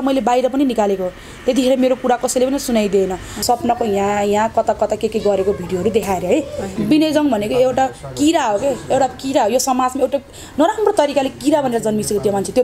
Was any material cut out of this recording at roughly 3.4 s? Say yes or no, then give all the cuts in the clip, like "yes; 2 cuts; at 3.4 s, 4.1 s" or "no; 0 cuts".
yes; 2 cuts; at 3.4 s, 6.7 s